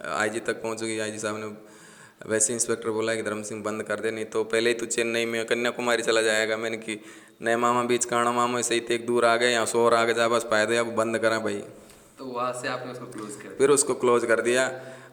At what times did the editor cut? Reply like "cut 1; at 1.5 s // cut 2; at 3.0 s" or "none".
none